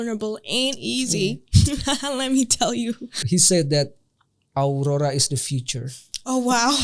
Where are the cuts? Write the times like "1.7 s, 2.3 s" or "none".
3.2 s